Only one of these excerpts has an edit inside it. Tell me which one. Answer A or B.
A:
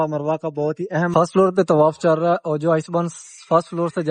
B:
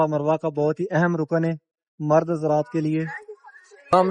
A